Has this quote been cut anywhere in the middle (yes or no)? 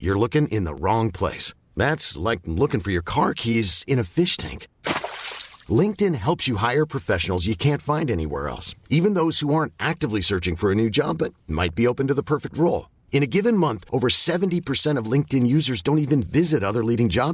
no